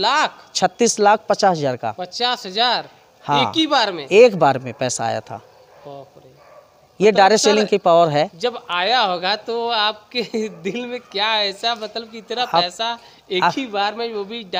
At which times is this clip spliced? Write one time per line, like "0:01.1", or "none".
none

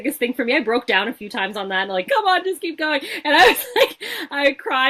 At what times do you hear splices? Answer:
0:02.1

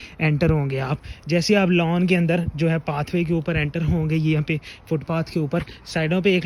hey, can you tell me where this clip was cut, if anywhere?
none

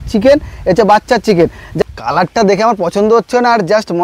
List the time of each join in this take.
0:01.7

